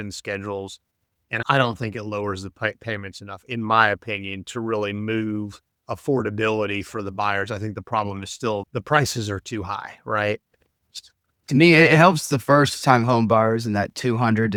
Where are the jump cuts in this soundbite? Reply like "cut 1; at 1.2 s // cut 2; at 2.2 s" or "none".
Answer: none